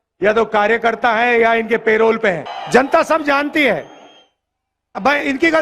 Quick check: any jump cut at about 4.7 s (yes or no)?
no